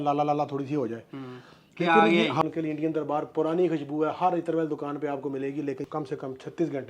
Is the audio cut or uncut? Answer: cut